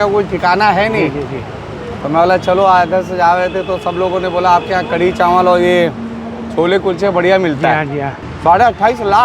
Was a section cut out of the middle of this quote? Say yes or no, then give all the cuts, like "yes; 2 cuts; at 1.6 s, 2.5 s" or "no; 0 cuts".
yes; 1 cut; at 8.2 s